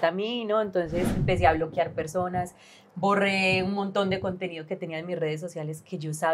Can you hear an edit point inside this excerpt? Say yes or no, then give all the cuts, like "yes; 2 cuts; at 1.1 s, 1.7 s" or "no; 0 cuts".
yes; 1 cut; at 1.2 s